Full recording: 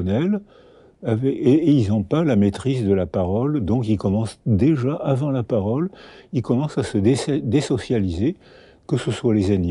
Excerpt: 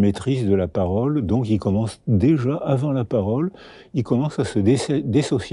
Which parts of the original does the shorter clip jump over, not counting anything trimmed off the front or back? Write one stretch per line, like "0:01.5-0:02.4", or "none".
none